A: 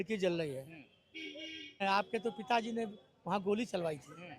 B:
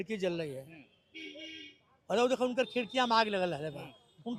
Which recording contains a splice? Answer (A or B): A